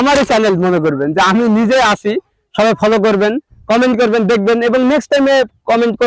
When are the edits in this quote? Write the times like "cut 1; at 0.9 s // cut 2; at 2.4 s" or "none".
none

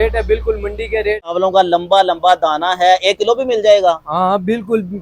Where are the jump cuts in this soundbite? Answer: cut 1; at 1.3 s

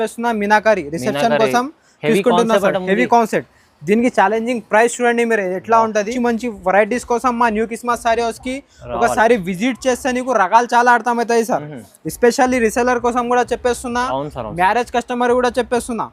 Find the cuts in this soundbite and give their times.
cut 1; at 6.1 s

